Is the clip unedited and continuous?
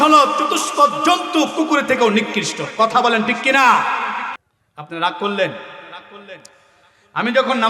no; 1 cut; at 4.4 s

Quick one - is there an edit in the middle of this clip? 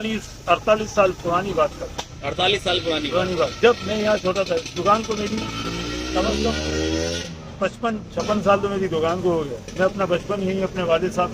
no; 0 cuts

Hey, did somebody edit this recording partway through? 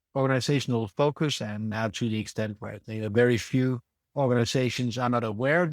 no; 0 cuts

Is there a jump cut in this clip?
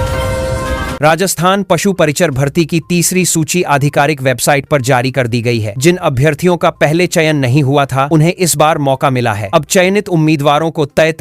yes; 1 cut; at 1.0 s

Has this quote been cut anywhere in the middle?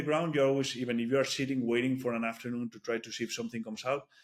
no; 0 cuts

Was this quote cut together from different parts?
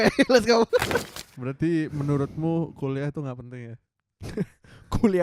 yes; 1 cut; at 1.0 s

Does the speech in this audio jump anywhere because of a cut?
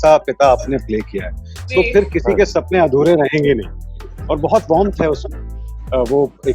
no; 0 cuts

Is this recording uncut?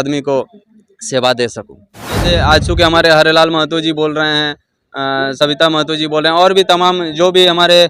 no; 1 cut; at 2.2 s

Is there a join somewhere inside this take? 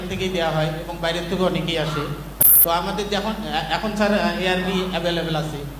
no; 0 cuts

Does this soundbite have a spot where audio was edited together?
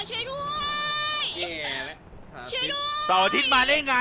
no; 0 cuts

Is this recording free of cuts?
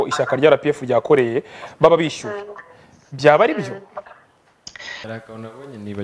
no; 1 cut; at 5.1 s

